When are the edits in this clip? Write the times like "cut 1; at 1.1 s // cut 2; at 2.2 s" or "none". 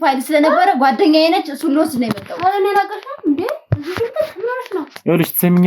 none